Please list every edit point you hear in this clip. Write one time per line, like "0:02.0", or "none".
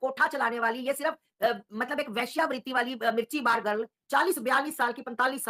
0:04.0

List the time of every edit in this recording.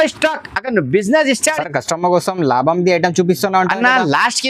0:01.5

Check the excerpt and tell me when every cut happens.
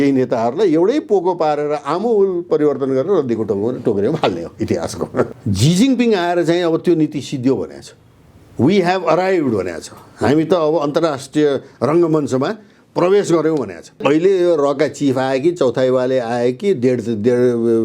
0:05.3
0:14.0

